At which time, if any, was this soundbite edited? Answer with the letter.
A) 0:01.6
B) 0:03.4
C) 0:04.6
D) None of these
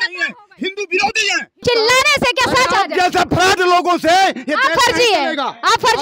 A